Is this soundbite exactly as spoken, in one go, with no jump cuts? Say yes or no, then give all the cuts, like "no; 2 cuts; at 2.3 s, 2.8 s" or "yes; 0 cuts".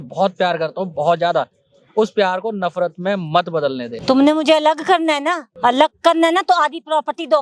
no; 2 cuts; at 3.9 s, 5.5 s